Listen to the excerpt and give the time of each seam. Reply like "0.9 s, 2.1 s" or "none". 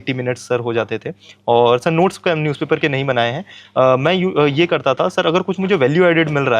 none